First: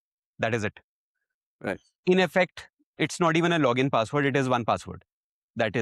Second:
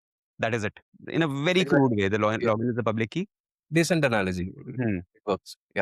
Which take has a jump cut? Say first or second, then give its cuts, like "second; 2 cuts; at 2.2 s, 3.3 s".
second; 1 cut; at 0.9 s